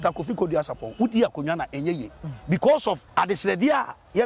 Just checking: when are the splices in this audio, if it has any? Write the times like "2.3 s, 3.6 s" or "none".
3.0 s